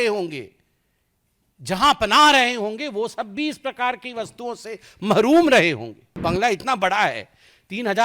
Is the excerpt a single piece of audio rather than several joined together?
no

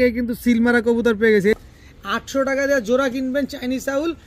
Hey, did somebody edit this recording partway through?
yes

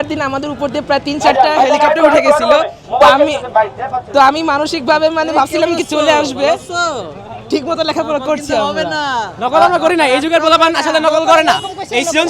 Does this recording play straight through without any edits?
yes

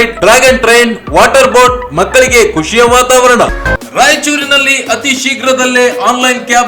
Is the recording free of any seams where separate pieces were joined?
no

